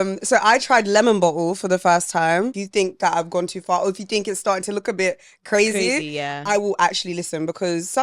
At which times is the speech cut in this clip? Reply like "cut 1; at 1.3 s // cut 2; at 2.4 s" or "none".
cut 1; at 2.6 s